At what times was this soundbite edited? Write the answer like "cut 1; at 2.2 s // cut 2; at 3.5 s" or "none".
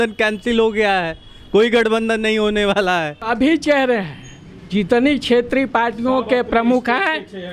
cut 1; at 3.2 s